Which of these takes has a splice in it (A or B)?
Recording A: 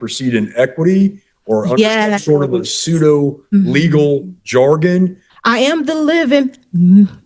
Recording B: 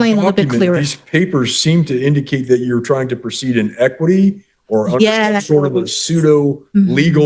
A